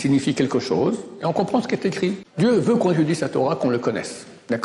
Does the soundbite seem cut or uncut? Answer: cut